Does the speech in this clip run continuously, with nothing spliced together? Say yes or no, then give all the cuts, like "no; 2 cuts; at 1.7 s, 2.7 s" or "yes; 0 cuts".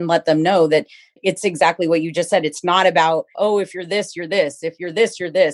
no; 2 cuts; at 1.2 s, 3.3 s